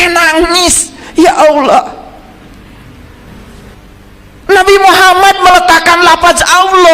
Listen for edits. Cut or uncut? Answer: cut